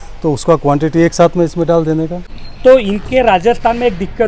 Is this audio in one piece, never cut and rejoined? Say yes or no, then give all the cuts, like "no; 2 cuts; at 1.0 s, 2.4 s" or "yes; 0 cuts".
no; 1 cut; at 2.3 s